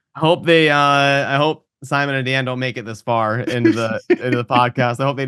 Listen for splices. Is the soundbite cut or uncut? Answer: uncut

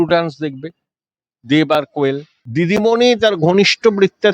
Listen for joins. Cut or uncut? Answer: cut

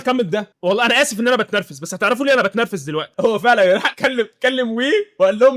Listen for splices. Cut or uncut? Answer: cut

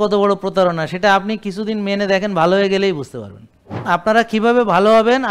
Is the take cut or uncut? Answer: cut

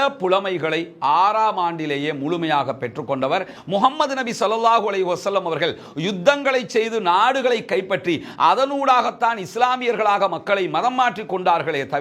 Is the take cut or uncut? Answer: cut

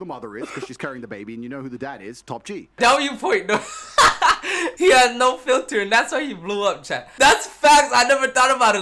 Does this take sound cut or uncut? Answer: cut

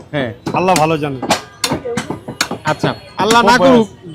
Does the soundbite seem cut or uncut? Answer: uncut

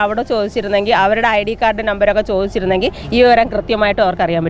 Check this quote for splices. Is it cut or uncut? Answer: uncut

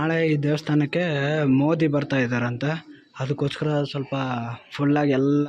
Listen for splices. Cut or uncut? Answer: uncut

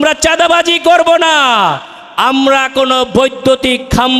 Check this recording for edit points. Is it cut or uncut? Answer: uncut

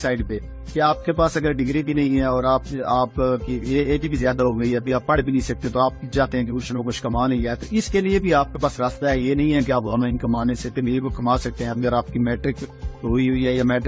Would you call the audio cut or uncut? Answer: uncut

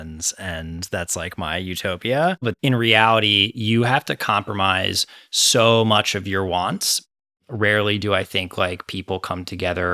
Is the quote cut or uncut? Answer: cut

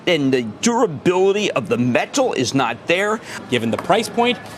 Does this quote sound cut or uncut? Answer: cut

